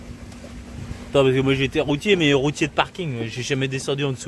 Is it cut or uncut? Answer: uncut